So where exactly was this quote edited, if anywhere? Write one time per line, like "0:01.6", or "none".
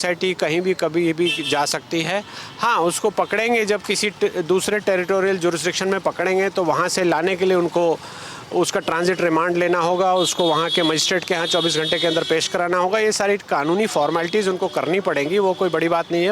none